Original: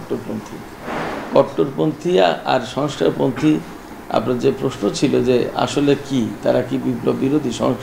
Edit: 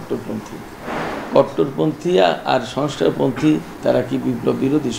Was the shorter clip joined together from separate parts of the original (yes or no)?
yes